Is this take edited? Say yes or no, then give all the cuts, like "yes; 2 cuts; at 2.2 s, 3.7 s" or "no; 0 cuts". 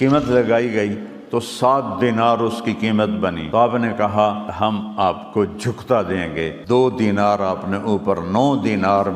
yes; 3 cuts; at 3.6 s, 4.7 s, 6.6 s